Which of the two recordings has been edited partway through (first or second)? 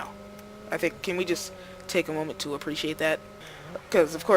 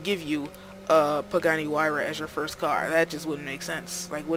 first